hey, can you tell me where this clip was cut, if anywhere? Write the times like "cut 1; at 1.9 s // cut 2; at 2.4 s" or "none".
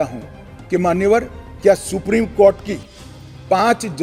none